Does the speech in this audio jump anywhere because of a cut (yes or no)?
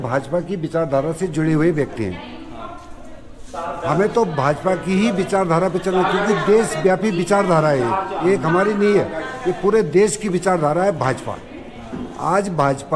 no